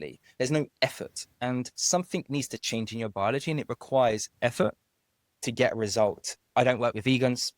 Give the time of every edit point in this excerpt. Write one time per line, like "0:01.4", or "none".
0:06.4